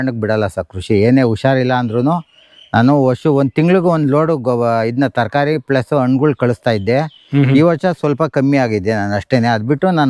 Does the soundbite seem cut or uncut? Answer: uncut